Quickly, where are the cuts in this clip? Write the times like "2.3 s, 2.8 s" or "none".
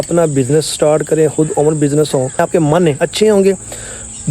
2.4 s